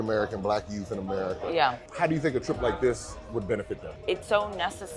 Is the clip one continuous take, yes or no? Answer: no